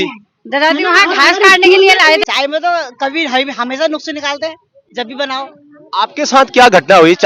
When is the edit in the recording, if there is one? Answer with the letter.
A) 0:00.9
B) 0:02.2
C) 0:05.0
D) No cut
B